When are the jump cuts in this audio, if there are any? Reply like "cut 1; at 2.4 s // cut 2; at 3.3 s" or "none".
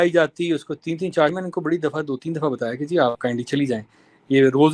cut 1; at 1.4 s